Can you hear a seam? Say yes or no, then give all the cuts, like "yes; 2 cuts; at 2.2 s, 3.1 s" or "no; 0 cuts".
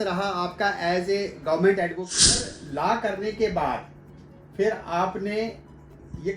yes; 1 cut; at 2.1 s